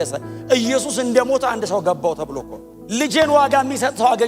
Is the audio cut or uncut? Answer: uncut